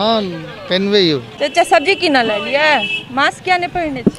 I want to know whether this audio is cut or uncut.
cut